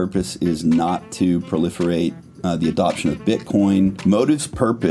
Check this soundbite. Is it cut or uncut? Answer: cut